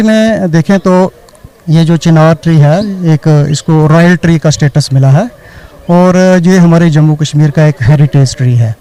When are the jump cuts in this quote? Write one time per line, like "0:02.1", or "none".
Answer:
none